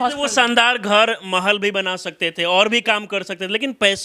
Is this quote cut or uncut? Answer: uncut